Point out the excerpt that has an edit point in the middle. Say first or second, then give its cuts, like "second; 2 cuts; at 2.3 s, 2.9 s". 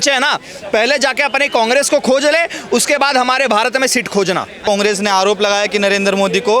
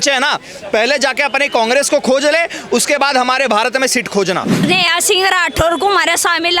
second; 1 cut; at 4.6 s